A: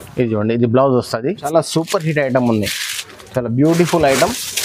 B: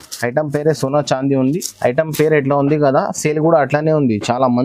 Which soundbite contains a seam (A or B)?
A